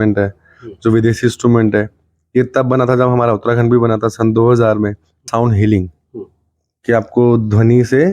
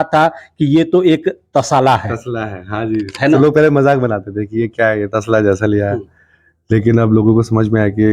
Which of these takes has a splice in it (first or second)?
first